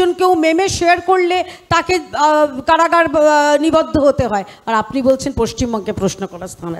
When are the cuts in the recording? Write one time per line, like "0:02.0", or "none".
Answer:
none